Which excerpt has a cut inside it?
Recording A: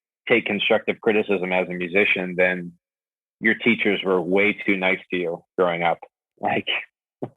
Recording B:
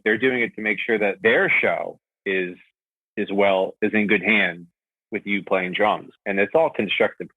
B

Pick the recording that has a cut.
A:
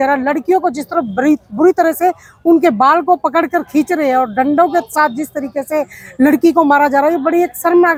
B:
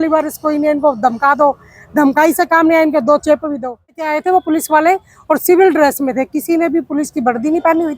B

